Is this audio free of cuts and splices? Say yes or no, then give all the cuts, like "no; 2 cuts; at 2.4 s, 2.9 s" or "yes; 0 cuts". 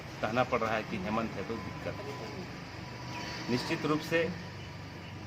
yes; 0 cuts